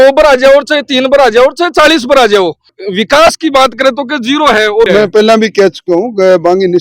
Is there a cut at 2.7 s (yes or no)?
yes